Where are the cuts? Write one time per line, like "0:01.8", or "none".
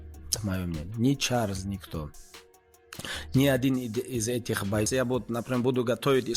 0:04.9